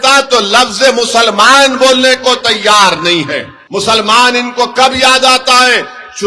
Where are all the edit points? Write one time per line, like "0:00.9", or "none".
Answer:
0:03.5